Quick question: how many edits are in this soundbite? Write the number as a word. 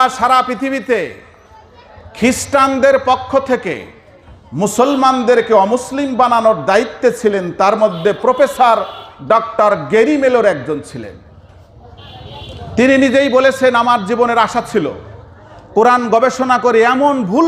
zero